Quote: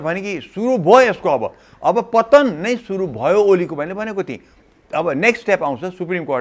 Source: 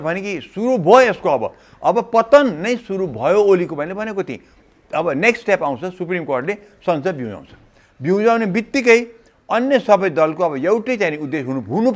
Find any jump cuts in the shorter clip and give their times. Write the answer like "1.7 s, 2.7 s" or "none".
none

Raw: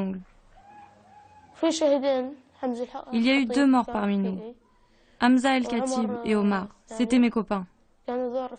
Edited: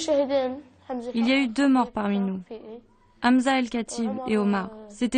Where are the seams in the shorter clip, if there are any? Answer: 1.0 s

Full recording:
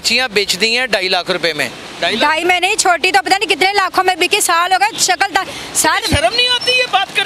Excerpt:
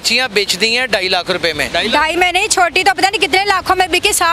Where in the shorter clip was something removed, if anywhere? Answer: 1.6 s

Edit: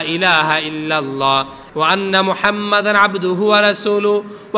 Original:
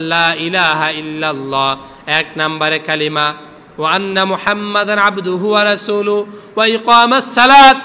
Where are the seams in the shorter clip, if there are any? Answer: 1.6 s

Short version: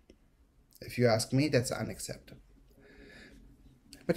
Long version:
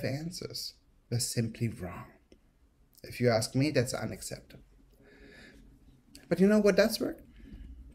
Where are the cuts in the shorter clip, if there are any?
none

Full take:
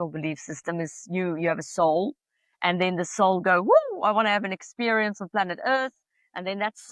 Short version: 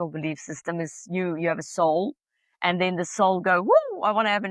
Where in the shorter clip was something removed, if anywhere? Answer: none

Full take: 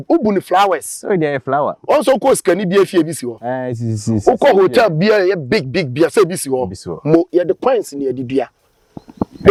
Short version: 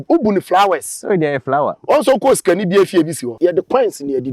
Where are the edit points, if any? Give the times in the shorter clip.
3.4 s

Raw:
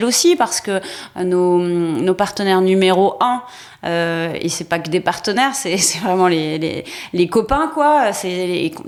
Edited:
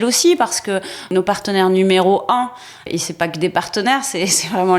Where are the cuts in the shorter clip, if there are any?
1.1 s, 2.8 s

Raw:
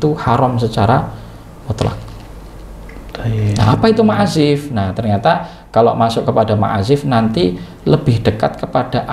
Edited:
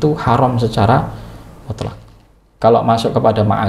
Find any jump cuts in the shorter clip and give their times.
2.4 s

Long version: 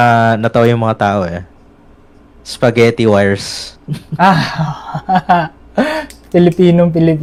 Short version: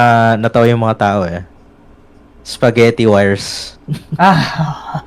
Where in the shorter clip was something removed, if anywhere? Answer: none

